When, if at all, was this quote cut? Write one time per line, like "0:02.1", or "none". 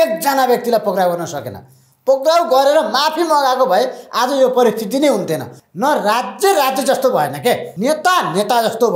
0:05.5
0:07.7